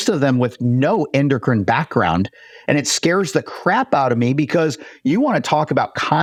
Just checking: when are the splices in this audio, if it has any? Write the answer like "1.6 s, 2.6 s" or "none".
none